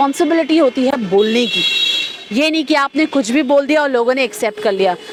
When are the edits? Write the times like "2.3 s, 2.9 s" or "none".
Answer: none